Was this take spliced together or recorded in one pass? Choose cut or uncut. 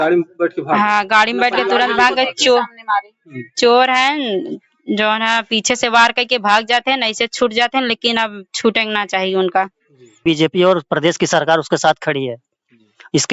cut